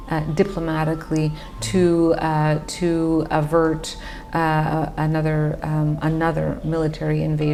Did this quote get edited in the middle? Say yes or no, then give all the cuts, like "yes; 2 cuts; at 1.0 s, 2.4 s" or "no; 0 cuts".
no; 0 cuts